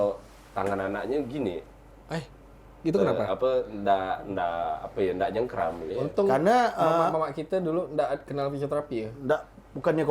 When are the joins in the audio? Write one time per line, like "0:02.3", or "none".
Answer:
0:05.9